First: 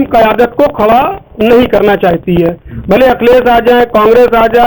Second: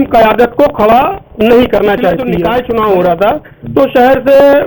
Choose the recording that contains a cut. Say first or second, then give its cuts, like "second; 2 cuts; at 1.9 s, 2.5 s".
second; 1 cut; at 2.3 s